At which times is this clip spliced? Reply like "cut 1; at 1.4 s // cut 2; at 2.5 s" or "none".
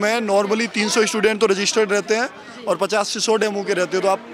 none